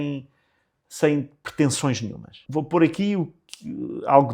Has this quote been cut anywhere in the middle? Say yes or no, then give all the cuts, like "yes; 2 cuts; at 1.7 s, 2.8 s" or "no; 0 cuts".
yes; 1 cut; at 2.4 s